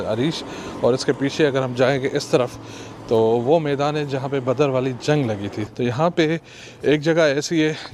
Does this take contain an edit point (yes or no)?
yes